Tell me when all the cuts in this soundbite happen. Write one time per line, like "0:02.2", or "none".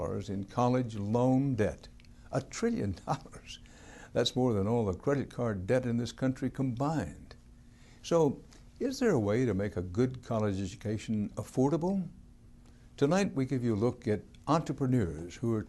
0:07.9